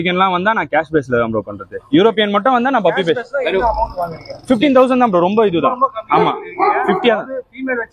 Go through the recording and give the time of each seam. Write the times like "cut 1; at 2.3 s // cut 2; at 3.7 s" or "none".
none